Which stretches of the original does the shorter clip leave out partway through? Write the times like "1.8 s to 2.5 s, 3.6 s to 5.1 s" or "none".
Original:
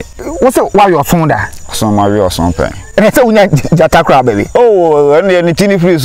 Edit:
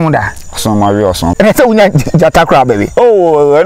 2.5 s to 2.9 s